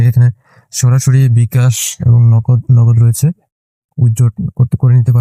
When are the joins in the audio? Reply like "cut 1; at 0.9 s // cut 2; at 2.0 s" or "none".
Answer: none